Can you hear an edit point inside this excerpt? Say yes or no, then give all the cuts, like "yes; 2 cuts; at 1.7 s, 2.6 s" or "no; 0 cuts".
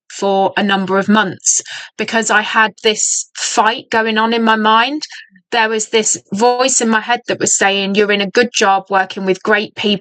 no; 0 cuts